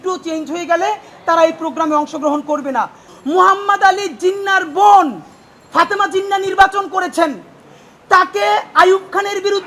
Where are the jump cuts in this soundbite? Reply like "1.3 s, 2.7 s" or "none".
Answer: 3.0 s